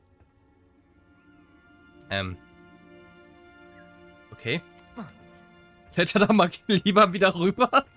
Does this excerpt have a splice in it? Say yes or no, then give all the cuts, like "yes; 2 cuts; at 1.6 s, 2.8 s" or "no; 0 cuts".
no; 0 cuts